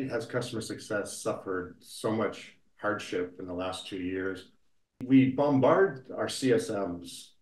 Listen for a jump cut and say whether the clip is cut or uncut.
cut